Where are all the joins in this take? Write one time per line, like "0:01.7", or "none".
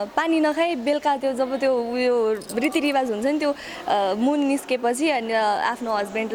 none